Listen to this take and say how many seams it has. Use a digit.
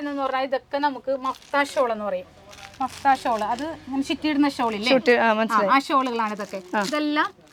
0